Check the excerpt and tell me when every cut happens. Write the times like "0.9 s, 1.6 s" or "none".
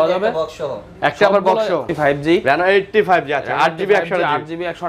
1.9 s